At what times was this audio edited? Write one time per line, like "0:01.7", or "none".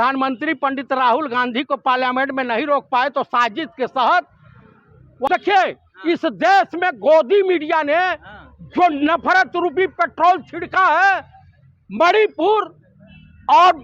0:05.3